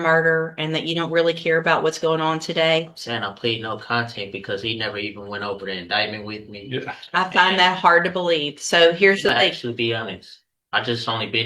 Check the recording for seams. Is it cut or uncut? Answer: uncut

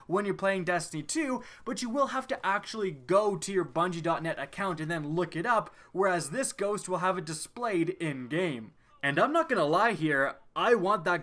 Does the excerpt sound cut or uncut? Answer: uncut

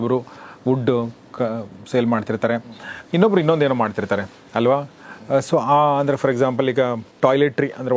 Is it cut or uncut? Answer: uncut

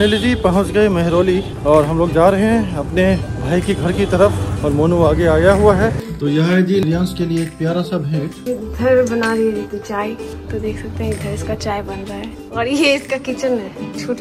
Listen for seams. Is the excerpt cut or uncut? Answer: cut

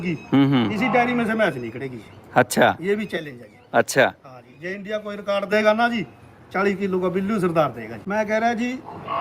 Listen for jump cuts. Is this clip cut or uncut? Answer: cut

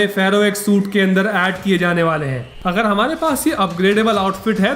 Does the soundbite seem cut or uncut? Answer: cut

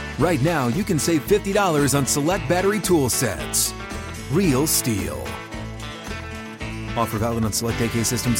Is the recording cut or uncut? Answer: uncut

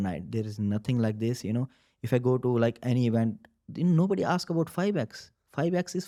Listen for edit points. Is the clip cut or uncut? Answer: uncut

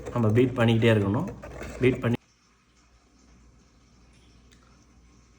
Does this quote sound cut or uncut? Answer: cut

